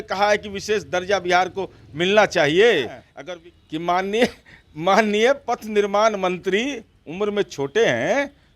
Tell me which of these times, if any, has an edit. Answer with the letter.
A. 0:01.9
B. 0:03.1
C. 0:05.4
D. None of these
B